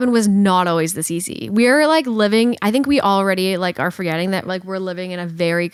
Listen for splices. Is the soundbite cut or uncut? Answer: uncut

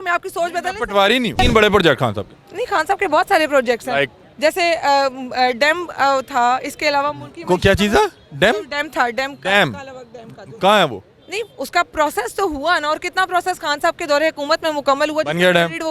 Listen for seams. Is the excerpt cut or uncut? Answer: cut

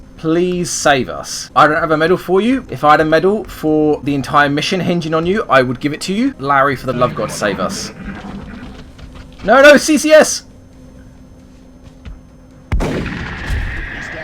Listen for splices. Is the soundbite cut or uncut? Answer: cut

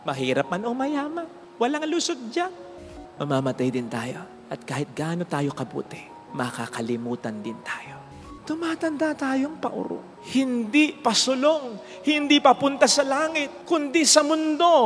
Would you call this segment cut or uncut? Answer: cut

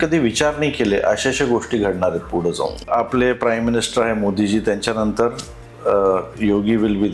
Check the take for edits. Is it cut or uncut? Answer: cut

